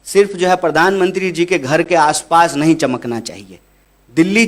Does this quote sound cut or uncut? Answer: uncut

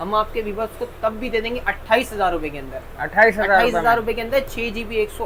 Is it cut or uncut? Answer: uncut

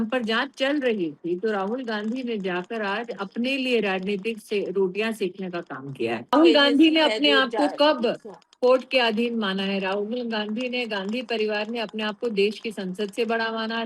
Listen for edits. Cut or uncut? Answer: cut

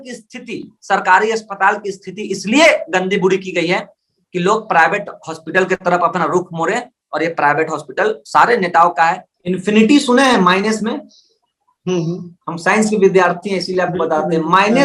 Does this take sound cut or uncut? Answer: cut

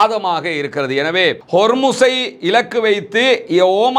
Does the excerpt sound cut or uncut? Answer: cut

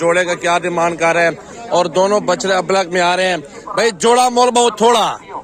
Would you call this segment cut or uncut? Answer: uncut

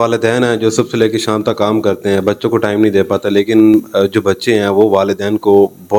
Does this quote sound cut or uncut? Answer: uncut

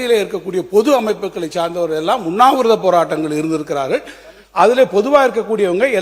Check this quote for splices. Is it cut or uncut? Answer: uncut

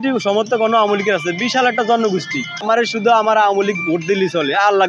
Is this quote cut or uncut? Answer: cut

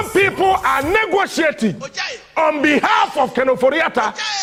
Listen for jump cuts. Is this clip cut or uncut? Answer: uncut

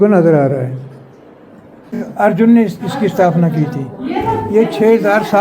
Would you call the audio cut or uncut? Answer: cut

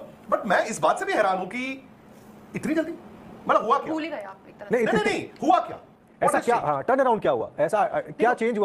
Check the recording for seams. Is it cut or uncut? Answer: uncut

